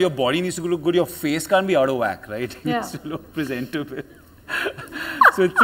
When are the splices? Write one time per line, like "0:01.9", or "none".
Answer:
none